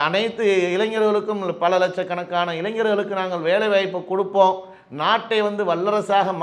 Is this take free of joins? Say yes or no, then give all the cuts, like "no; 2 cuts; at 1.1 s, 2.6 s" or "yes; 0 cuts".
yes; 0 cuts